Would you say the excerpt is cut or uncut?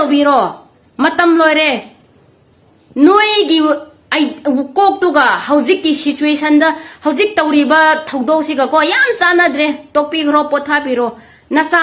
uncut